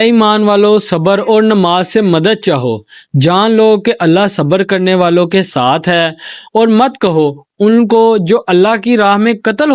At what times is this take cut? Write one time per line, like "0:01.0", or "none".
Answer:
none